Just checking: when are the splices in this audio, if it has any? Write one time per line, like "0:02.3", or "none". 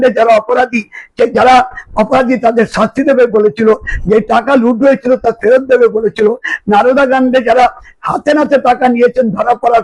none